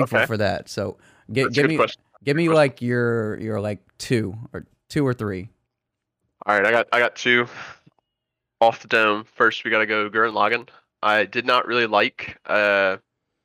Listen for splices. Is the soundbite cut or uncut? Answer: uncut